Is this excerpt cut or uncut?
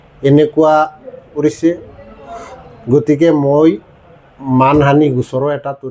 uncut